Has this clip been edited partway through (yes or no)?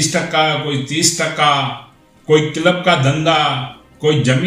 no